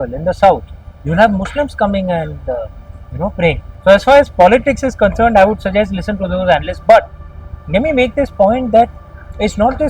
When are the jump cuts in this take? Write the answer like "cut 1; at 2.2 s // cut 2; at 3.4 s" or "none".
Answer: cut 1; at 3.7 s

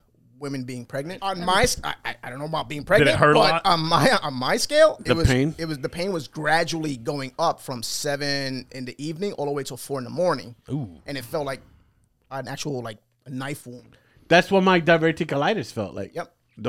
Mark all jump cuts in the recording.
cut 1; at 1.2 s

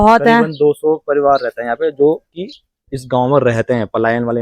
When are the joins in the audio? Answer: none

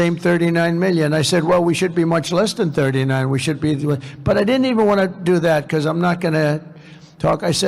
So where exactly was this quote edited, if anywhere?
none

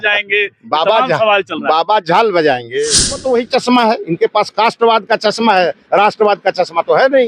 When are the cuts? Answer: cut 1; at 3.2 s

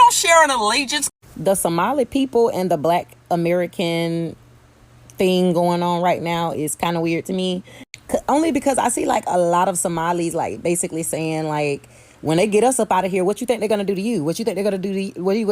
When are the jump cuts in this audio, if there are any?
cut 1; at 0.9 s

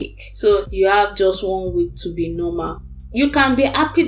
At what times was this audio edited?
cut 1; at 2.9 s

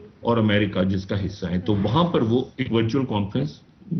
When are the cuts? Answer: none

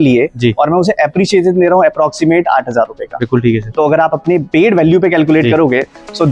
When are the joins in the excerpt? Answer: none

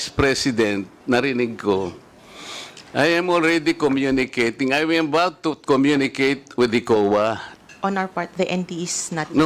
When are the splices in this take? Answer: cut 1; at 7.5 s

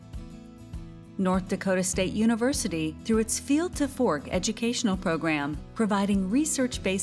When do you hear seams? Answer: cut 1; at 1.2 s

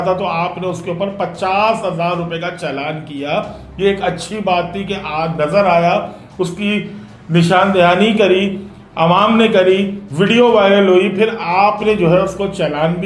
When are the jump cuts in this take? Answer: none

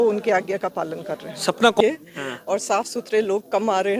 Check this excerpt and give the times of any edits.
cut 1; at 1.8 s

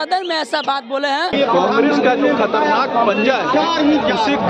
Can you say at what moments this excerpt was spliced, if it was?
cut 1; at 1.3 s

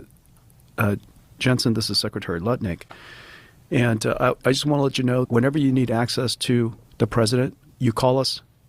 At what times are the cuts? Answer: cut 1; at 5.3 s // cut 2; at 6.8 s // cut 3; at 7.7 s

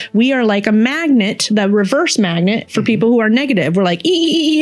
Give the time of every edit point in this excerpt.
none

